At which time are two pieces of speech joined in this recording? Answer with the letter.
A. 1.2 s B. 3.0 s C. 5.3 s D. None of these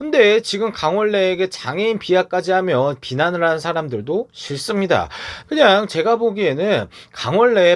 C